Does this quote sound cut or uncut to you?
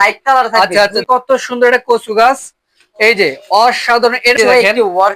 cut